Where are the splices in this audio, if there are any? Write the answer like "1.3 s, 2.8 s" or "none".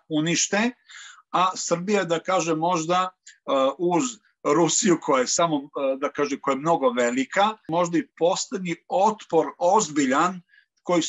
7.7 s